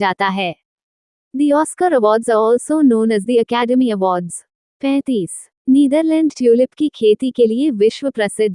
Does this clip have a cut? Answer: no; 0 cuts

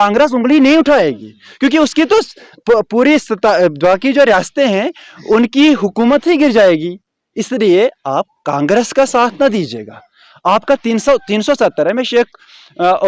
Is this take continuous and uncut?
yes; 0 cuts

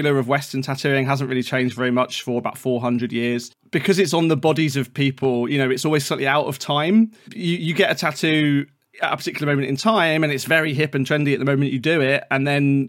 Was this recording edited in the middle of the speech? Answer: yes; 1 cut; at 3.5 s

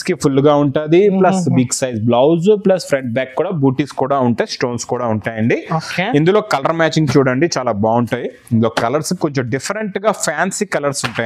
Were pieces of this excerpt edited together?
no; 0 cuts

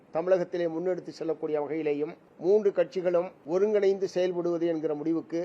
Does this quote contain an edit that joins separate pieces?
yes; 2 cuts; at 2.2 s, 3.4 s

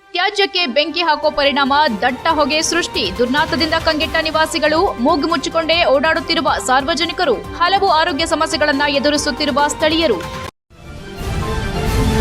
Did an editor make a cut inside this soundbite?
yes; 1 cut; at 10.5 s

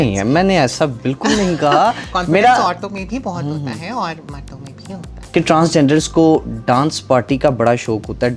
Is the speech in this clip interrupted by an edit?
no; 0 cuts

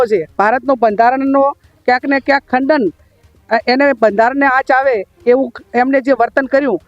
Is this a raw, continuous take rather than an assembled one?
yes; 0 cuts

